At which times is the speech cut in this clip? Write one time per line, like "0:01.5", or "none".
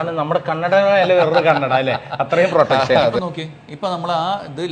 0:03.2